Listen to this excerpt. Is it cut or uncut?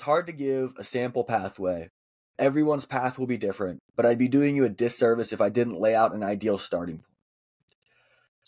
uncut